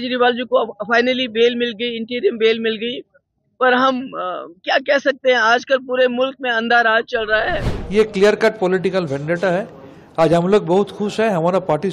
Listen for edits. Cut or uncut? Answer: cut